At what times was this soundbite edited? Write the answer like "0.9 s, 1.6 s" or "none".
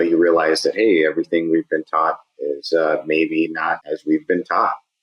3.8 s